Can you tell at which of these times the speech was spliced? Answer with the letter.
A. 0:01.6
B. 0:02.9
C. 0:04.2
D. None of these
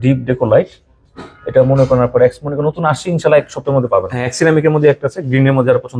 C